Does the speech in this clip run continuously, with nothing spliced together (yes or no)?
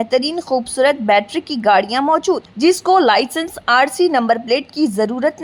yes